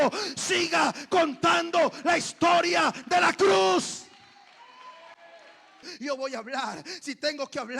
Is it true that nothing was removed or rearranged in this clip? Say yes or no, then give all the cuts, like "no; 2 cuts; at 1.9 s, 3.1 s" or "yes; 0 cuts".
no; 1 cut; at 5.9 s